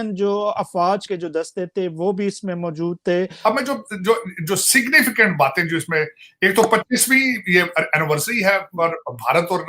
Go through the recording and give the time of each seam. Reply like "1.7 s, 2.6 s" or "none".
1.0 s, 3.3 s